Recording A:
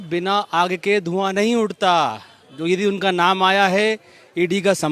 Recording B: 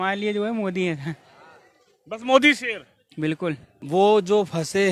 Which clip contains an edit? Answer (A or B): B